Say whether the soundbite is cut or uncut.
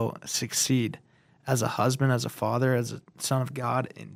uncut